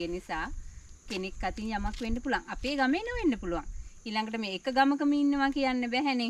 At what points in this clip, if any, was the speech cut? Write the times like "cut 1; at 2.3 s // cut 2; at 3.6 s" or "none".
none